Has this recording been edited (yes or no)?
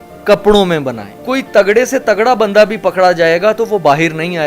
yes